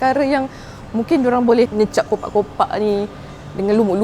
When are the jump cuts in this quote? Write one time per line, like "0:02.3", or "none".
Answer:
0:01.7